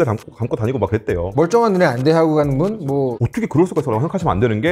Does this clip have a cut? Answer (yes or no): yes